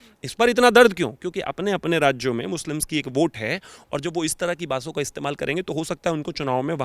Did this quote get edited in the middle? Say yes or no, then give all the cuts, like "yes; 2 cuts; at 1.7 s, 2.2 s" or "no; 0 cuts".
no; 0 cuts